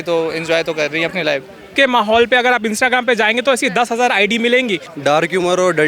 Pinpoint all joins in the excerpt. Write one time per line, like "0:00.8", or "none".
0:01.7
0:04.9